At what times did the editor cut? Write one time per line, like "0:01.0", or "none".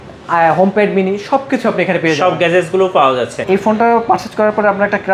0:03.4